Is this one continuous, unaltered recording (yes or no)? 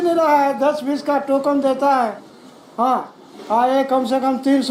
yes